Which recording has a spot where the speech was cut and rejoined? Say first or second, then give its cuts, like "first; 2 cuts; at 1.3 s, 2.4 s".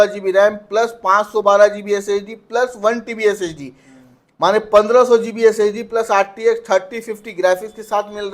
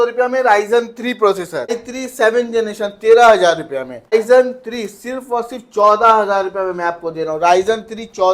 second; 2 cuts; at 1.8 s, 4.1 s